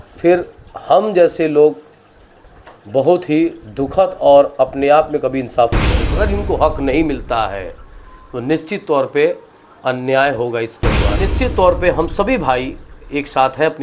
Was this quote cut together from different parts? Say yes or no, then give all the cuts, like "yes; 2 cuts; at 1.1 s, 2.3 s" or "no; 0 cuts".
yes; 2 cuts; at 6.0 s, 11.2 s